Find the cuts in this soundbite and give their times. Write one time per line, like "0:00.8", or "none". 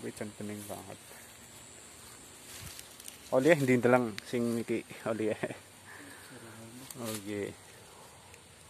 none